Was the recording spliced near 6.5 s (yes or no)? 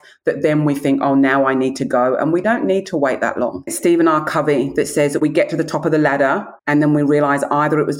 yes